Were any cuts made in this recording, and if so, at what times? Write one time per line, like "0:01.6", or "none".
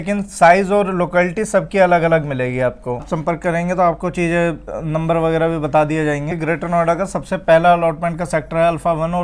0:03.1
0:06.3